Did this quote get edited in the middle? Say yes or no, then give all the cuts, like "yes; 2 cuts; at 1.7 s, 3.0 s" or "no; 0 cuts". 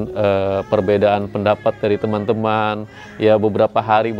no; 0 cuts